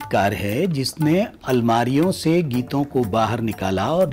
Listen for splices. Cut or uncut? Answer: uncut